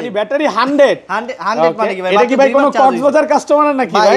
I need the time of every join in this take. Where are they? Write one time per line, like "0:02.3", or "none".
none